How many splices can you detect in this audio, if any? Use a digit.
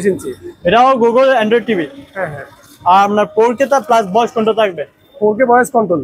0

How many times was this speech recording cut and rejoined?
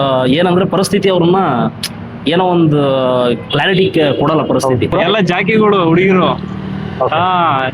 2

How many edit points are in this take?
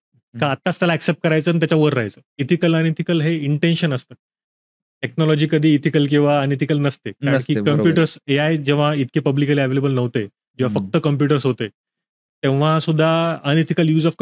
1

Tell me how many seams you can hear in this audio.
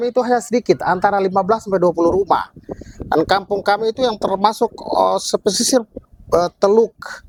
0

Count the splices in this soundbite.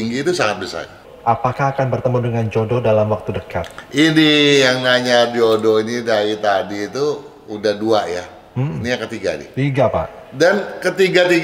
1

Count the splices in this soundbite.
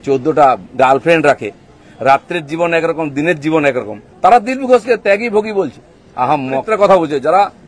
1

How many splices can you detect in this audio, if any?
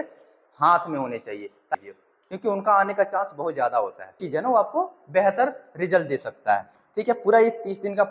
3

